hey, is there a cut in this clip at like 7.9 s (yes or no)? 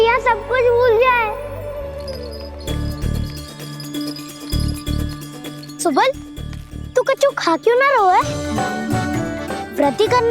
no